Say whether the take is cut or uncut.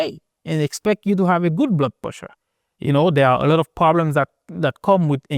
uncut